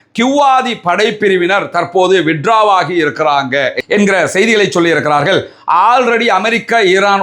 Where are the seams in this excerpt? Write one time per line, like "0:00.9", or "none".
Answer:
none